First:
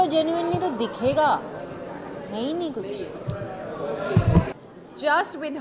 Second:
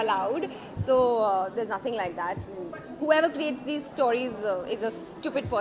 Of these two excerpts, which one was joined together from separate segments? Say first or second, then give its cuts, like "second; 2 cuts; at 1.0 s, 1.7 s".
first; 1 cut; at 4.6 s